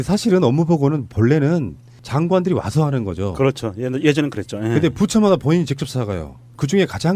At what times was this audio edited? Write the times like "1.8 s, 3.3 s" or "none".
4.5 s